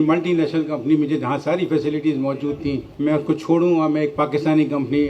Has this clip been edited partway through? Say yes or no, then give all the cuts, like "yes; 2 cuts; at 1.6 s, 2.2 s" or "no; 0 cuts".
no; 0 cuts